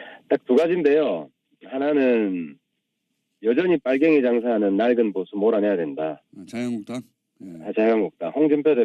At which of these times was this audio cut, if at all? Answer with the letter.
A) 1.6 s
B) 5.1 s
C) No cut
B